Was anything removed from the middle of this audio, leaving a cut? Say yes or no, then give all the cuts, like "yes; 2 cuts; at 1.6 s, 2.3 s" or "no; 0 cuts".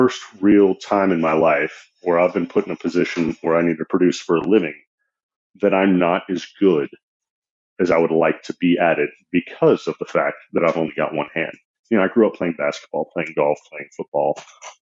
no; 0 cuts